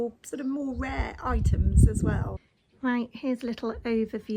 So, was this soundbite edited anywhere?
yes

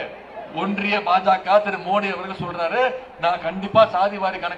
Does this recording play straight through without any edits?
yes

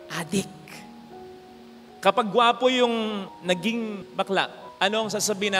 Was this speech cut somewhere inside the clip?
no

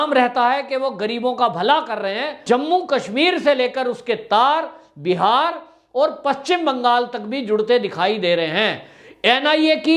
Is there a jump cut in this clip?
yes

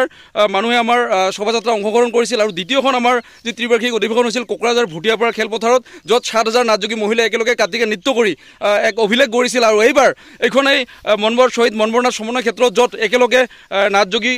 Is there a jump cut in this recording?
no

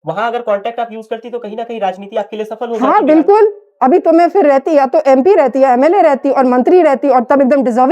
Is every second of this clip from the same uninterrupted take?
yes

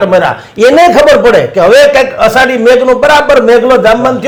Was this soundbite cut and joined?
no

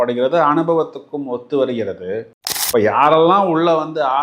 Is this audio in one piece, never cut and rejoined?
no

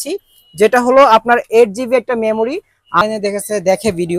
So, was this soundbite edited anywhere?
yes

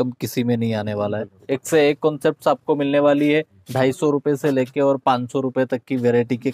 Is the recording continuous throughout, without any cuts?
no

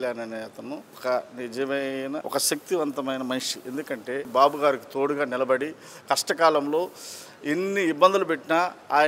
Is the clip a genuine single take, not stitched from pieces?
no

